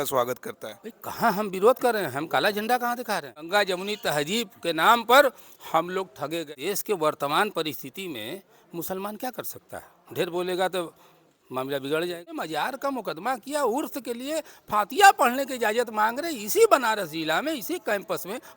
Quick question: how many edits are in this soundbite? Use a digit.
3